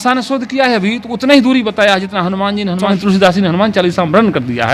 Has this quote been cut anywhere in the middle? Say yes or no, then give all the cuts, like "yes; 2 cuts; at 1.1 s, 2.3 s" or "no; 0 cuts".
yes; 1 cut; at 2.9 s